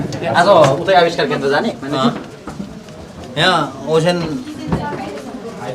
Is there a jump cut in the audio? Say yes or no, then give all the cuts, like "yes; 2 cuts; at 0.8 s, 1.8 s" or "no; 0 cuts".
no; 0 cuts